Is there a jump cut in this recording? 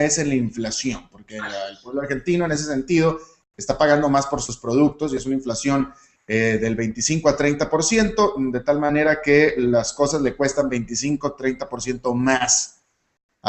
yes; 1 cut; at 7.5 s

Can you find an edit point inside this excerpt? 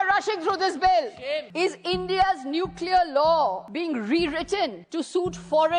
yes; 3 cuts; at 1.5 s, 3.7 s, 4.8 s

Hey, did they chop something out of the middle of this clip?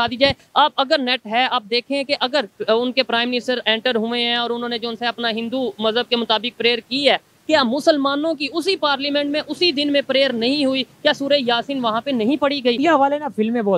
yes; 1 cut; at 12.8 s

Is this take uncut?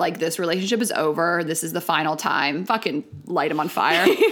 no; 1 cut; at 2.6 s

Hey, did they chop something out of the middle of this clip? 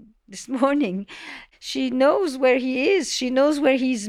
yes; 1 cut; at 1.4 s

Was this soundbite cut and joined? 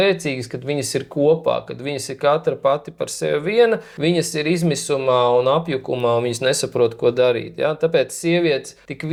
no; 0 cuts

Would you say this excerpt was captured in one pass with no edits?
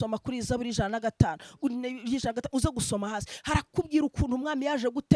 yes; 0 cuts

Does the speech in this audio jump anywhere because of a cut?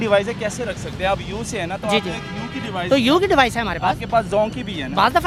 no; 0 cuts

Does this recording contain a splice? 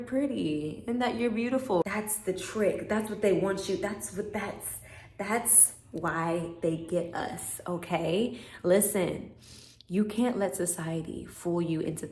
yes; 1 cut; at 1.8 s

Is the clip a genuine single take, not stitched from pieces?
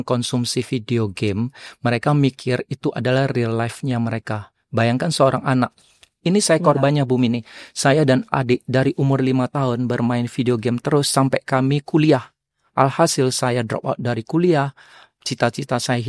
yes; 0 cuts

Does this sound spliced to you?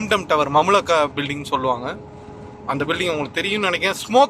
no; 0 cuts

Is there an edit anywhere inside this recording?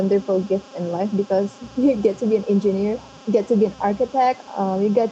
yes; 1 cut; at 1.5 s

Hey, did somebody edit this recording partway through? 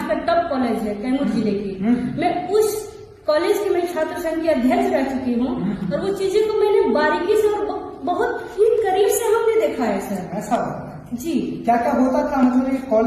no; 0 cuts

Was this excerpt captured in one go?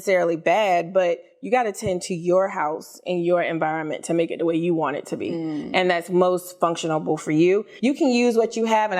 no; 1 cut; at 7.7 s

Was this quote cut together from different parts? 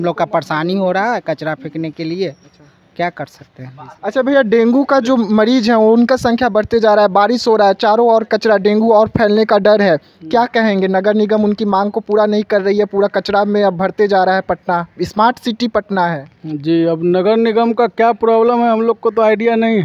no; 0 cuts

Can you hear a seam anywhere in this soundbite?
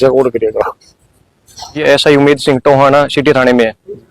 yes; 1 cut; at 1.8 s

